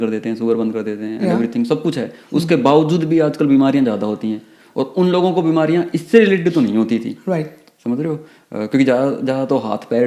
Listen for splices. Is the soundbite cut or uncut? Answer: uncut